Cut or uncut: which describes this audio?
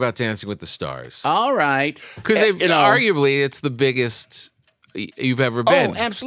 cut